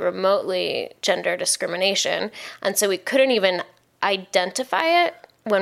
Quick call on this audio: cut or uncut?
cut